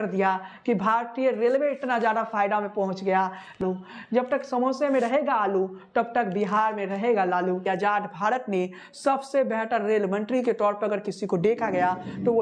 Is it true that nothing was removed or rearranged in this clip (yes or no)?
no